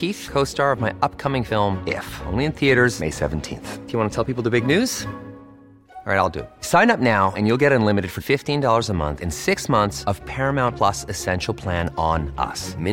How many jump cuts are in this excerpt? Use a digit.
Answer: 0